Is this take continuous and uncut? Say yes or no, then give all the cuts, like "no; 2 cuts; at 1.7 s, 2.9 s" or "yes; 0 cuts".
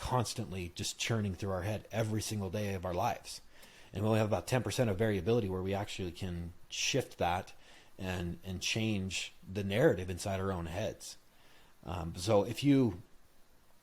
yes; 0 cuts